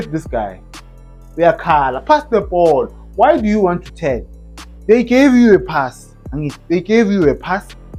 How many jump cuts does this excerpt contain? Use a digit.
0